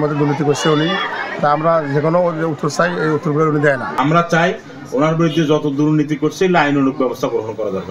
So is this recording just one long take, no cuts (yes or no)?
no